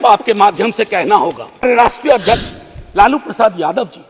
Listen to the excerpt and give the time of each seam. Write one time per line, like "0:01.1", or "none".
0:01.6